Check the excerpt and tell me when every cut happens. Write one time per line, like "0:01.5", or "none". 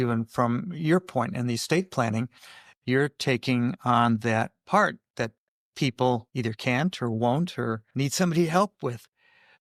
none